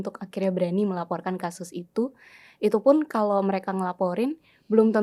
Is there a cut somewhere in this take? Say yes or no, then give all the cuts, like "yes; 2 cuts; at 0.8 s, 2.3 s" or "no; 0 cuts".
no; 0 cuts